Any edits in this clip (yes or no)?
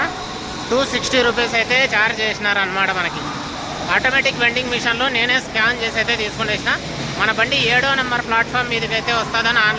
no